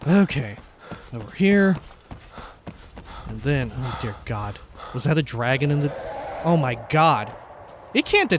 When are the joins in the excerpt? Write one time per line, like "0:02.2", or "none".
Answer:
0:06.3